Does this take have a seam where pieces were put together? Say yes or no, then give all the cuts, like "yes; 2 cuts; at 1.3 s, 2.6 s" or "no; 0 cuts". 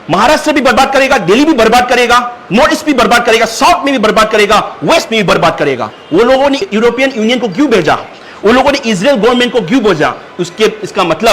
yes; 1 cut; at 5.9 s